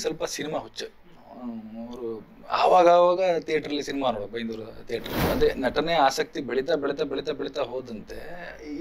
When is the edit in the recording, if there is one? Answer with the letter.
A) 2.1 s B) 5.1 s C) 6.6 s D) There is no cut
B